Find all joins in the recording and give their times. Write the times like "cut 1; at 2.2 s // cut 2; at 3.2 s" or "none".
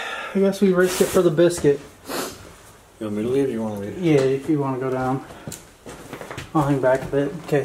none